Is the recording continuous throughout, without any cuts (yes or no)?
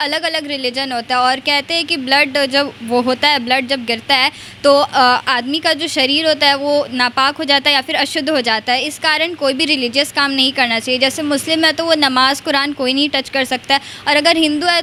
yes